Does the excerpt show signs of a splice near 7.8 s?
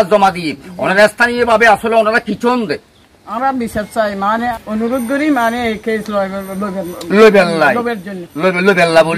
no; 1 cut; at 4.5 s

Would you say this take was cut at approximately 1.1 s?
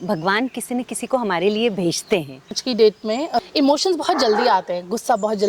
no; 2 cuts; at 2.6 s, 3.5 s

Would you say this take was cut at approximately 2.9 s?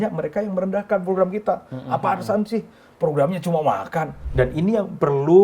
no; 1 cut; at 4.2 s

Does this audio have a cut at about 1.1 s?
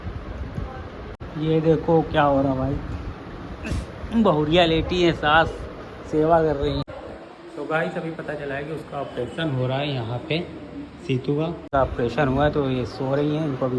yes; 3 cuts; at 1.1 s, 6.8 s, 11.7 s

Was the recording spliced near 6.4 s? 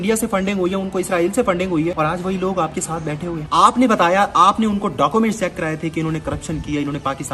no; 2 cuts; at 1.9 s, 3.4 s

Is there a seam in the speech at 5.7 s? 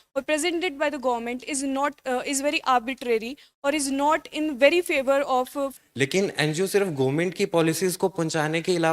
yes; 1 cut; at 5.7 s

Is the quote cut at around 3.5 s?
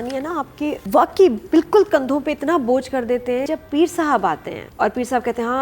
yes; 3 cuts; at 0.8 s, 3.5 s, 4.6 s

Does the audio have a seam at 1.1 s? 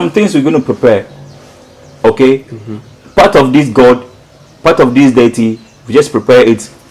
no; 0 cuts

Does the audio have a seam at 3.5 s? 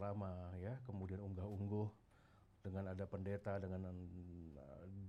no; 0 cuts

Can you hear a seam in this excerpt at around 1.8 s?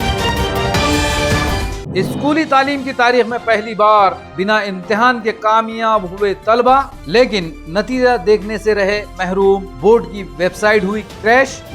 yes; 1 cut; at 1.8 s

